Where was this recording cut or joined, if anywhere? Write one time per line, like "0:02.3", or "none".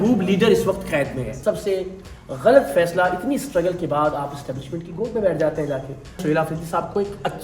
0:01.3
0:06.2